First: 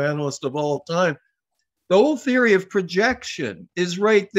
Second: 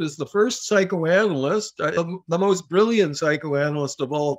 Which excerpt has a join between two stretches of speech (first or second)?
second